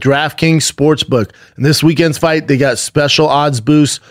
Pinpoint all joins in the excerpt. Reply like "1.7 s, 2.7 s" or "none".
1.5 s